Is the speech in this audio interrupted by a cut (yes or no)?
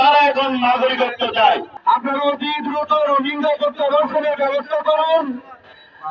yes